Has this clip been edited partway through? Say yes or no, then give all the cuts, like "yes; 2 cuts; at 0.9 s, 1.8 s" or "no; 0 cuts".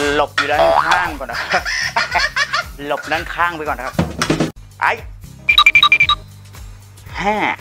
yes; 1 cut; at 4.5 s